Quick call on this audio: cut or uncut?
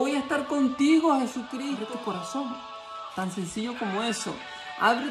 cut